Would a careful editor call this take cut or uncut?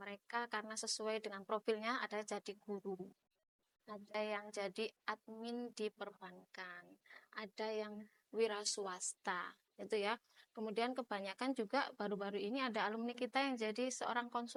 uncut